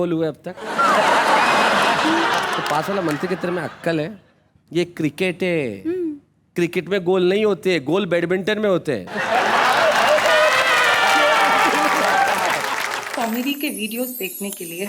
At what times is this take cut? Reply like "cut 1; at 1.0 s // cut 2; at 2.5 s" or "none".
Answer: cut 1; at 13.0 s